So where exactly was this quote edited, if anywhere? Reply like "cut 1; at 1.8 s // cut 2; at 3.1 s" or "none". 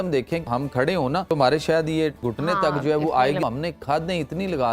cut 1; at 0.9 s // cut 2; at 2.2 s // cut 3; at 3.4 s